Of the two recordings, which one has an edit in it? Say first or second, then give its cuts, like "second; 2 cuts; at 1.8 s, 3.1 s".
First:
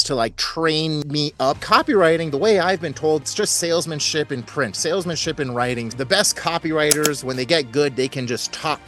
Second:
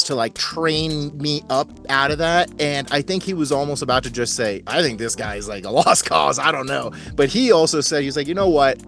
first; 3 cuts; at 1.5 s, 3.2 s, 5.9 s